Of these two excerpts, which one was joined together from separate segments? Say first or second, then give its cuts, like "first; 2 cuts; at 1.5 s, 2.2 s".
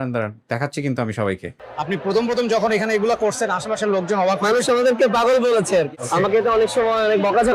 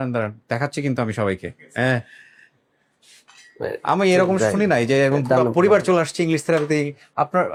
first; 2 cuts; at 1.6 s, 5.9 s